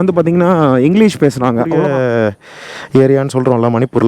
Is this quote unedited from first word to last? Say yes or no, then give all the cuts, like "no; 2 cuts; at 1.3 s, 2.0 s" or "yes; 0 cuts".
no; 1 cut; at 1.7 s